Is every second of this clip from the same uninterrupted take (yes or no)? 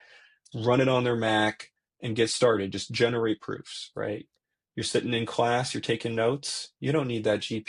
yes